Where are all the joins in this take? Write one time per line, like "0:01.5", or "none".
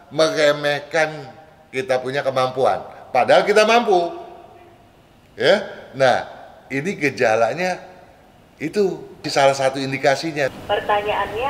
0:10.6